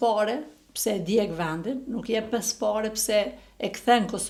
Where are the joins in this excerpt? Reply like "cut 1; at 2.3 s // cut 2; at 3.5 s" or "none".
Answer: none